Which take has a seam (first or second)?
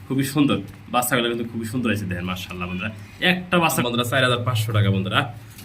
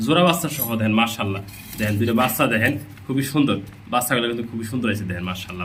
first